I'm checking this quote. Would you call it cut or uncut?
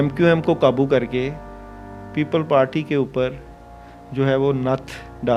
uncut